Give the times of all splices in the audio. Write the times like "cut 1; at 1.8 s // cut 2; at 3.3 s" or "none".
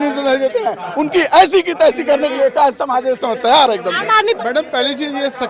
cut 1; at 4.4 s

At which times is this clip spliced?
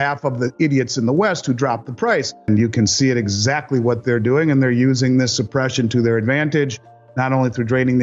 cut 1; at 2.5 s

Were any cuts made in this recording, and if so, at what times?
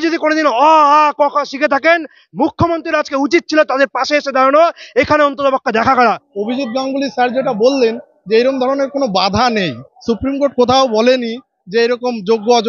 cut 1; at 6.0 s

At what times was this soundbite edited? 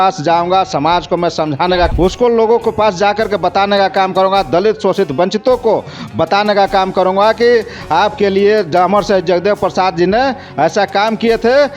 cut 1; at 1.9 s

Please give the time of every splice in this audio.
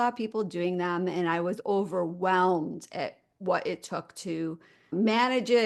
cut 1; at 4.7 s

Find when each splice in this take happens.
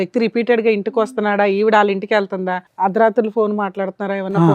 cut 1; at 2.6 s

